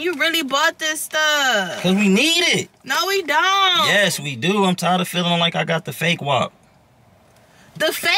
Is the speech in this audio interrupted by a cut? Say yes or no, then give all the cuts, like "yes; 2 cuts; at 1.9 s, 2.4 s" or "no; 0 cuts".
no; 0 cuts